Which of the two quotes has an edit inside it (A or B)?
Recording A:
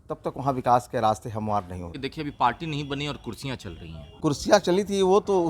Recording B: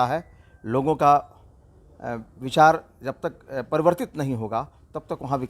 A